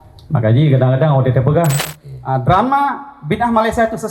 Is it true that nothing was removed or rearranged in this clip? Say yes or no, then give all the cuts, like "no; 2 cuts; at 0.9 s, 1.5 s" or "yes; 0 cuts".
no; 1 cut; at 1.9 s